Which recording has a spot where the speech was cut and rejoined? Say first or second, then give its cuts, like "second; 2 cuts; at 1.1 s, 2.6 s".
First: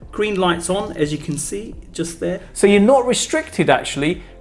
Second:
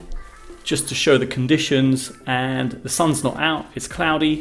first; 1 cut; at 2.5 s